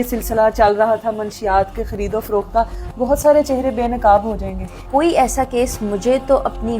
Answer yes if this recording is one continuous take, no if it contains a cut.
no